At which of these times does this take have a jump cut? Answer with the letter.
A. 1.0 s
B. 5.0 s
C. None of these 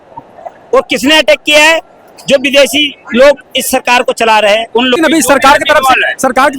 B